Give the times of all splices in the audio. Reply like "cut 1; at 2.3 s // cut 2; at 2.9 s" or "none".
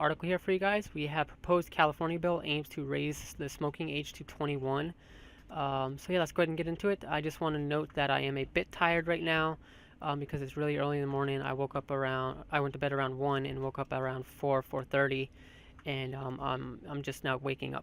cut 1; at 6.3 s